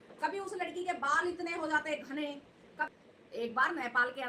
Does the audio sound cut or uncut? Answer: cut